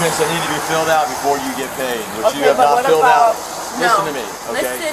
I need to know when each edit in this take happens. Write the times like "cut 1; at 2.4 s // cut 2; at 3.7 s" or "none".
none